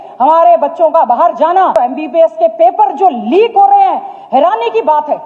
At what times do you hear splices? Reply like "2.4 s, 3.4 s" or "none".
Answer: 1.7 s